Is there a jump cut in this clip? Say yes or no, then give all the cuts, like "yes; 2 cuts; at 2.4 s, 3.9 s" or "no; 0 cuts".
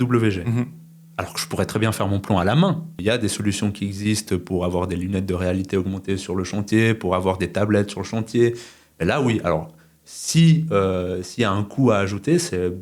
yes; 1 cut; at 2.9 s